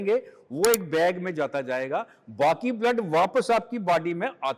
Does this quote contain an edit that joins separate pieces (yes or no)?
no